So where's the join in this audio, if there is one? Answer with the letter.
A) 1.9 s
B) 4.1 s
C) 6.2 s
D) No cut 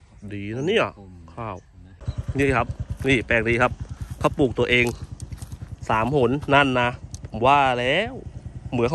A